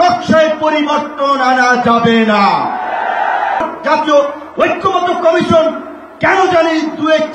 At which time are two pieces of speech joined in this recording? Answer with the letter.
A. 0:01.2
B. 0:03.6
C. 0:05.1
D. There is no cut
B